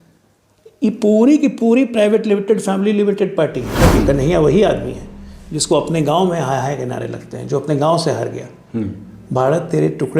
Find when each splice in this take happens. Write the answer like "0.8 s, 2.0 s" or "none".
3.9 s

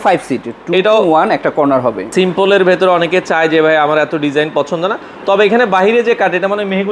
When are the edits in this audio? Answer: 2.1 s

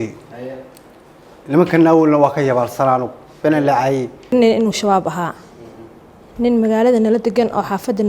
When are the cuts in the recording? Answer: 4.3 s

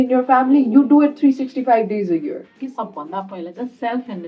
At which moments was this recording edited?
2.5 s

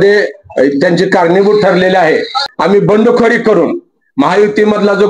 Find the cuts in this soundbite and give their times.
2.4 s

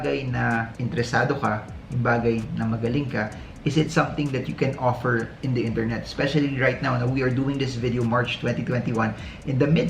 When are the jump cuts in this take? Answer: none

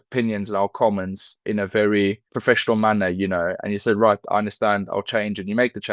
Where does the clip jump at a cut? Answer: 1.4 s

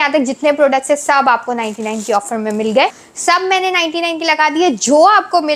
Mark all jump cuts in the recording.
3.0 s

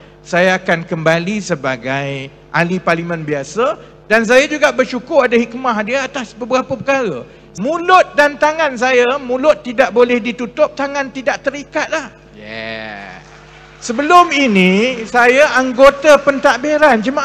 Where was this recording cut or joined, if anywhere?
7.4 s

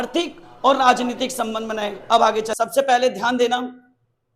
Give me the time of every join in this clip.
2.5 s

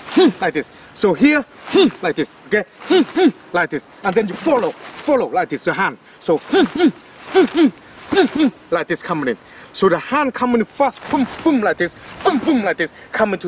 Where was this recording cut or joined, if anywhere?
none

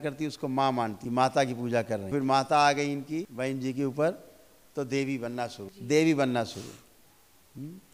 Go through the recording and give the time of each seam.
1.0 s, 2.1 s, 3.3 s, 5.7 s

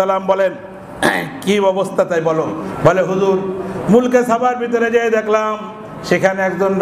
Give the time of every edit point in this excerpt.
2.6 s

